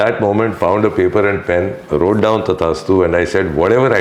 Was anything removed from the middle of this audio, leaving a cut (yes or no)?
no